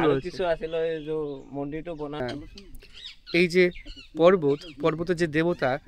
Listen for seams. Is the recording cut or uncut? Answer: cut